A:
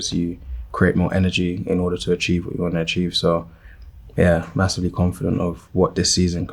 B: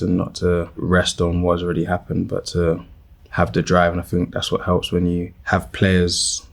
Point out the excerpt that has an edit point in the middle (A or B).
B